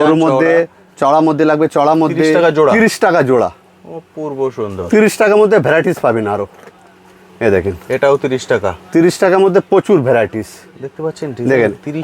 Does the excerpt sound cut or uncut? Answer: cut